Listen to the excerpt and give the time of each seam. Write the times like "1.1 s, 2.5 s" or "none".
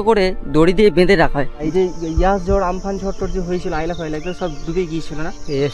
1.6 s

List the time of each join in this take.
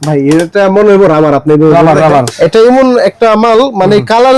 2.3 s

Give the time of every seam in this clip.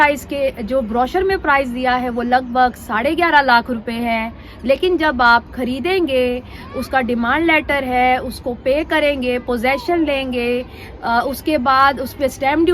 none

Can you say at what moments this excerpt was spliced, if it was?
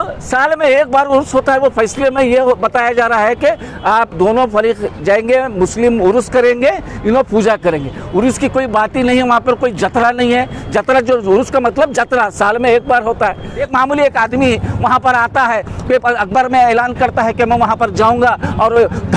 13.6 s

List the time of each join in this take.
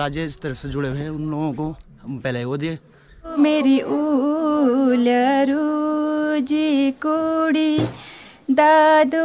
3.3 s

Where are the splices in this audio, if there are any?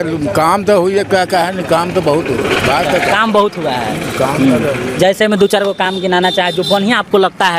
none

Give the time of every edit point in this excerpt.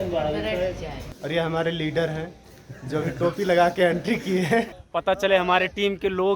1.0 s, 4.7 s

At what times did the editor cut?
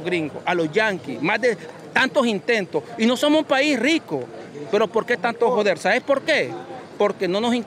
none

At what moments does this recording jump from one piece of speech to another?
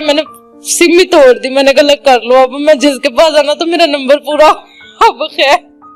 none

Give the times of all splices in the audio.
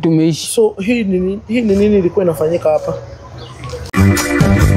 3.8 s

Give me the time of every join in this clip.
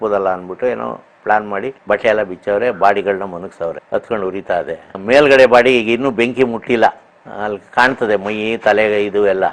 none

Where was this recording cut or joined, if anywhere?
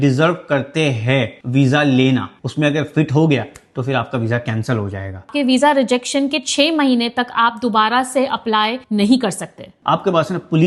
2.3 s, 5.3 s, 9.8 s

